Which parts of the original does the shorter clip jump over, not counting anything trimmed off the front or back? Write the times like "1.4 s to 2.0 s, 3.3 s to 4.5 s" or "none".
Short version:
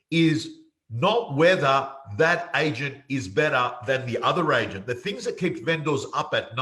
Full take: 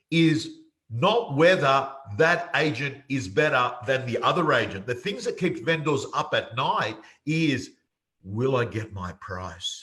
none